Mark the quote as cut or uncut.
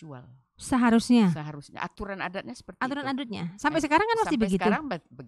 uncut